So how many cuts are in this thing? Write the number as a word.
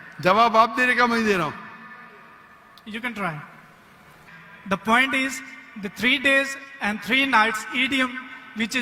one